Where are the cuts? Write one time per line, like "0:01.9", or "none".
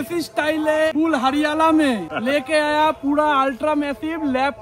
0:00.9
0:02.1